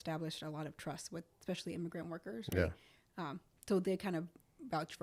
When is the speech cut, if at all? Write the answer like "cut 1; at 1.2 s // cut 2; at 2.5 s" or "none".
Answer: none